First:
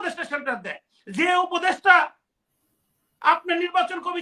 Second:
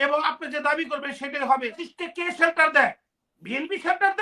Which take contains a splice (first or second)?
second